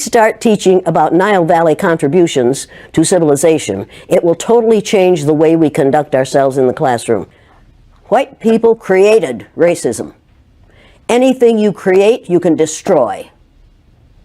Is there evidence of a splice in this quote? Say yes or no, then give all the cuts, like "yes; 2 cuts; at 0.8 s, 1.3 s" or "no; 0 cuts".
yes; 1 cut; at 7.4 s